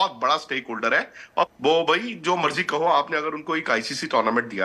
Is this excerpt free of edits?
no; 1 cut; at 1.5 s

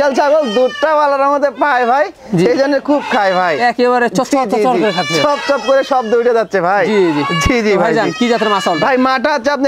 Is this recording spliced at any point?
no; 0 cuts

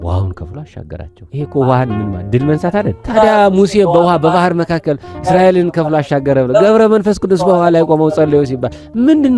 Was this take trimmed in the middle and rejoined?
no; 0 cuts

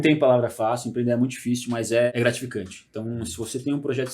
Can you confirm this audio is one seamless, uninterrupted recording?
no; 1 cut; at 2.1 s

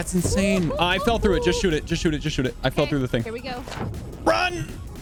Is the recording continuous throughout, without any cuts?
yes; 0 cuts

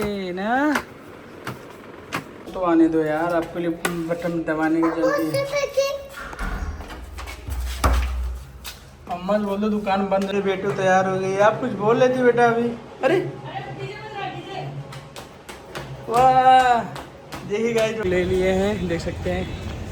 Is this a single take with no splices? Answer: no; 3 cuts; at 2.4 s, 10.3 s, 18.0 s

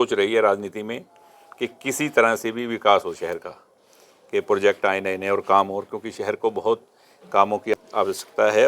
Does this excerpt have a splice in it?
yes; 1 cut; at 7.7 s

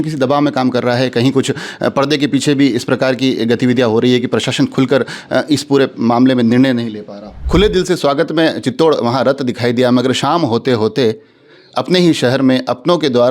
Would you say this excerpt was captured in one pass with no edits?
no; 1 cut; at 7.3 s

